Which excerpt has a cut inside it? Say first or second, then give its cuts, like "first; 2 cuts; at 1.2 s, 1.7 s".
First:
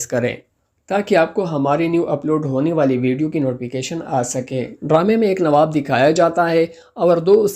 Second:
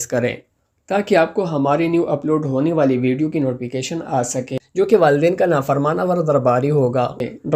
first; 1 cut; at 4.6 s